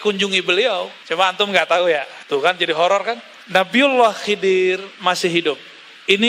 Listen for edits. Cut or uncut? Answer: cut